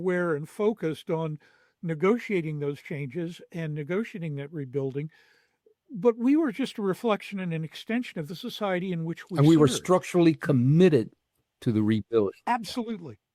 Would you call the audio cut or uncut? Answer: uncut